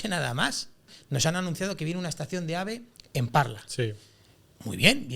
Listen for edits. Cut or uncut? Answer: cut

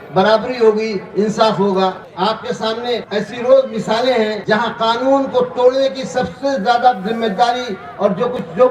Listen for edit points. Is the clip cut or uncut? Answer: cut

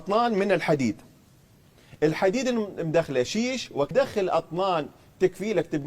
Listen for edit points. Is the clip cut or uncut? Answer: cut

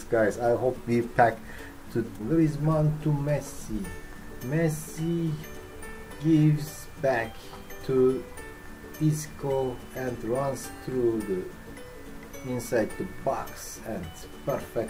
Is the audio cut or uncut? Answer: cut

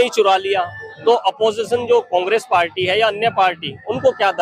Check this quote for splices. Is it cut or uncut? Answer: uncut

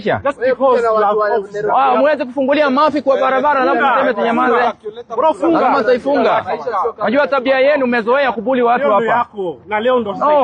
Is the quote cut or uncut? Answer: uncut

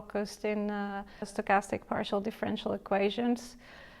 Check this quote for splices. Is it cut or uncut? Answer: cut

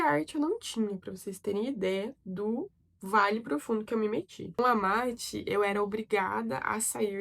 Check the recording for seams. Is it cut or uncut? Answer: uncut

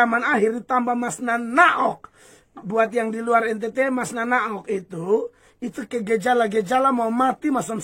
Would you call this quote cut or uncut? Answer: uncut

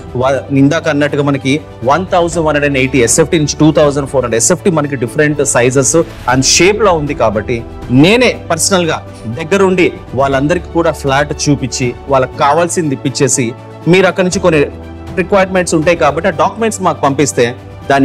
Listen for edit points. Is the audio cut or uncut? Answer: uncut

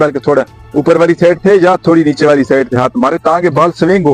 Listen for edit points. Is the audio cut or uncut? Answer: uncut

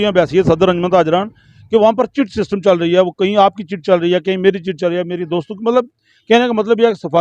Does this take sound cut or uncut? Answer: uncut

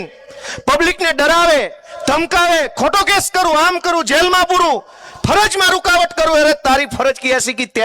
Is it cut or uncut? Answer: uncut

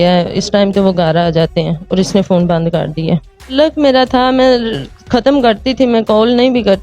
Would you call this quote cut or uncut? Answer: cut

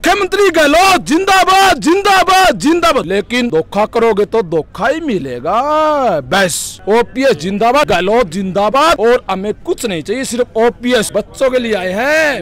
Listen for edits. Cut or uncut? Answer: uncut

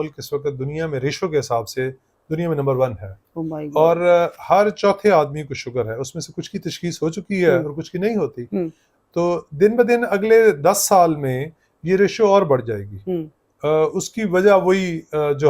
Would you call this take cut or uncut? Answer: uncut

